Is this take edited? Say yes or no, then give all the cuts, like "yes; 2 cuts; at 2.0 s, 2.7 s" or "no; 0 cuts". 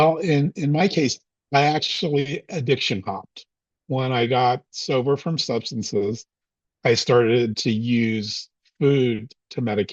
no; 0 cuts